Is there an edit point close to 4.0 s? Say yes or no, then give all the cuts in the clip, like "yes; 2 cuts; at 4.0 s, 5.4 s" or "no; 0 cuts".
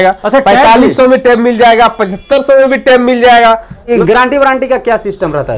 yes; 1 cut; at 4.0 s